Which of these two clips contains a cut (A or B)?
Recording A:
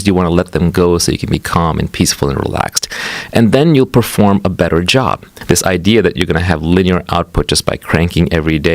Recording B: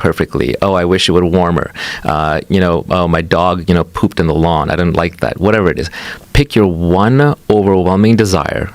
A